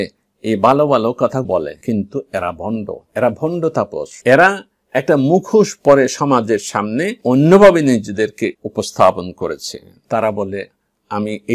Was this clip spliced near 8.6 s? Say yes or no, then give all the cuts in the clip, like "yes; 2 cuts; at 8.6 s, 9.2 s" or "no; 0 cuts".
yes; 1 cut; at 8.6 s